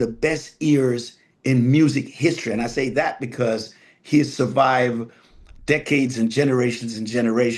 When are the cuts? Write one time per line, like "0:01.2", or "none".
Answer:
none

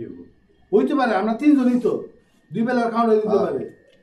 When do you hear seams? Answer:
none

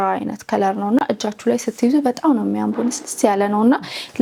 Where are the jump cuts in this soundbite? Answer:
none

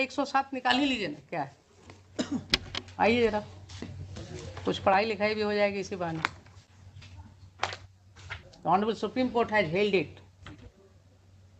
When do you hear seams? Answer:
0:08.5

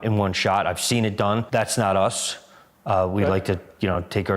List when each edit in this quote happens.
0:01.4

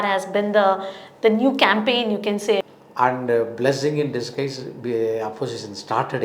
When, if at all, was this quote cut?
0:02.6

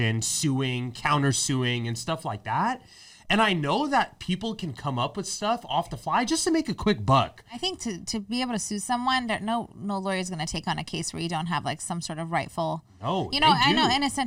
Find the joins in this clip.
0:07.7

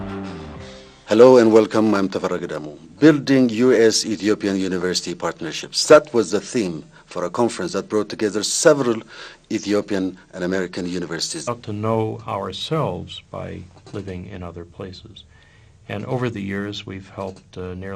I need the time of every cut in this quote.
none

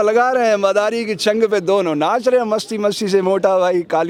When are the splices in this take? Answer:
none

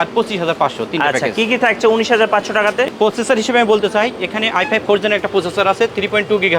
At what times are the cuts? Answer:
0:02.9

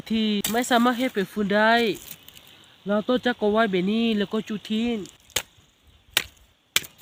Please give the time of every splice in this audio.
none

